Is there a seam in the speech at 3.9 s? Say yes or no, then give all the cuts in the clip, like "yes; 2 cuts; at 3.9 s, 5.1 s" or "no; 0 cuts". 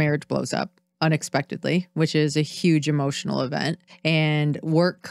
yes; 1 cut; at 3.9 s